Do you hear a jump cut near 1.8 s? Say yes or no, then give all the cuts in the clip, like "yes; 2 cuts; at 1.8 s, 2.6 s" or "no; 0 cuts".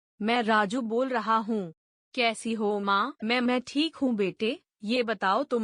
no; 1 cut; at 3.1 s